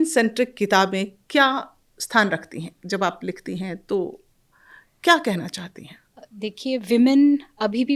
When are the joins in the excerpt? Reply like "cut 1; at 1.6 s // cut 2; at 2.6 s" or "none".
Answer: none